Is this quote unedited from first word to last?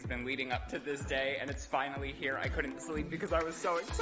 yes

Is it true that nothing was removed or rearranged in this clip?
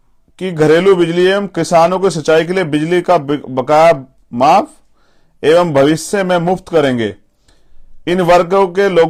yes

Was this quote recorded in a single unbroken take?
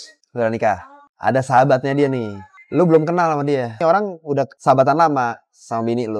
no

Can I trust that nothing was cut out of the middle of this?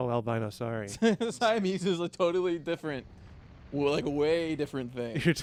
yes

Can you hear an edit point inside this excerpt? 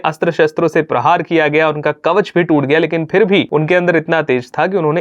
yes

